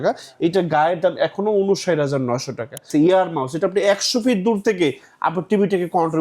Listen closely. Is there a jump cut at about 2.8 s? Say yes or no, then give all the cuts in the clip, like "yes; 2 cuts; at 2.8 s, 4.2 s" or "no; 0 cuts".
yes; 1 cut; at 2.8 s